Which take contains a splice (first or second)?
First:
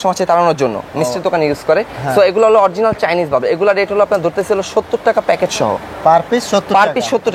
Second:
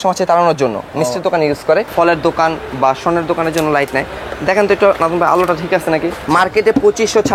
second